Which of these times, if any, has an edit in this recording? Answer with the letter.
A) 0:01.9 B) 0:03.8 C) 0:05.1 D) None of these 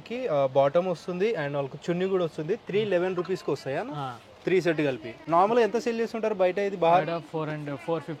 D